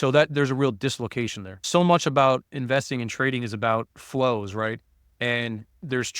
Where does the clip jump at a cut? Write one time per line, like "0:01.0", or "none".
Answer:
0:01.6